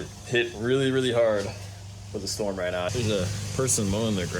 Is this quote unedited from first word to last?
no; 1 cut; at 2.9 s

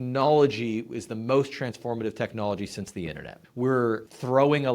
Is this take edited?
yes; 1 cut; at 3.4 s

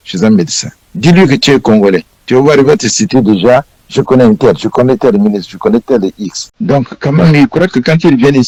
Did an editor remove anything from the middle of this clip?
no; 0 cuts

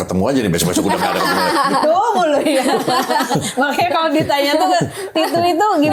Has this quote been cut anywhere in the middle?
no; 0 cuts

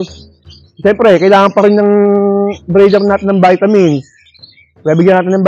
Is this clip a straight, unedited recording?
yes; 0 cuts

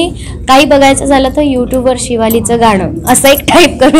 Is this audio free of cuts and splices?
yes; 0 cuts

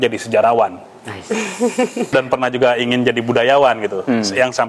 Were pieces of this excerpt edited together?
yes; 1 cut; at 2.1 s

